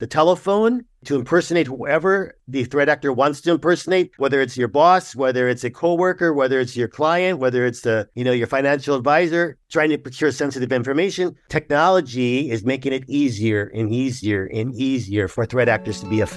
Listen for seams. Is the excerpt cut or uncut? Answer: cut